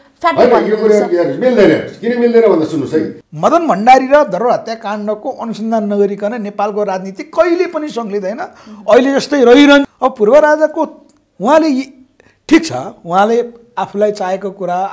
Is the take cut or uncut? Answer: cut